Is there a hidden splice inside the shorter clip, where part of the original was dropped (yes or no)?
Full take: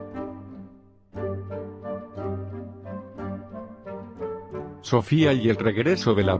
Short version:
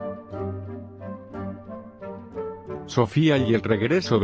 yes